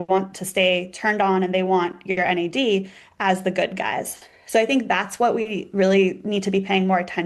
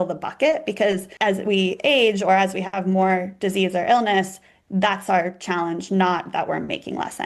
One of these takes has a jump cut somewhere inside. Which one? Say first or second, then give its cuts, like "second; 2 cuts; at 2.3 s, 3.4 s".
second; 1 cut; at 1.1 s